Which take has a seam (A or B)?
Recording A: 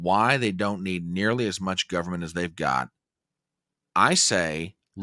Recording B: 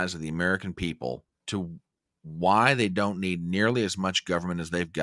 B